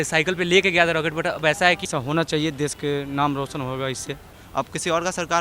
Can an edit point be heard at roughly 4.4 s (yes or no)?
yes